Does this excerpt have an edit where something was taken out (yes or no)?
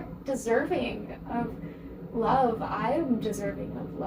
no